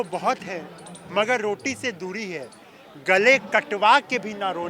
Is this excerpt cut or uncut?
uncut